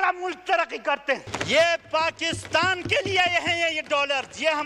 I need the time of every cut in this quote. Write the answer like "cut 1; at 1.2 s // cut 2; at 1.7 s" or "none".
cut 1; at 1.3 s